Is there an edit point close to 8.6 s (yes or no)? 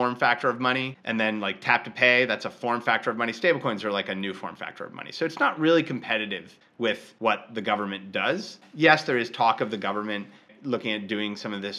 yes